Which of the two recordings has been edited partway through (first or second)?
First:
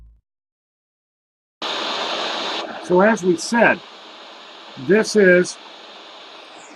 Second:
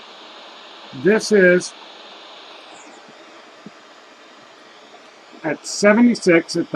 second